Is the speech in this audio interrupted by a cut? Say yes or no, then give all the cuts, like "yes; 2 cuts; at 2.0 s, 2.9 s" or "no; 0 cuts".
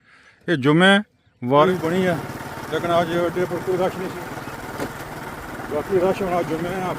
yes; 1 cut; at 1.7 s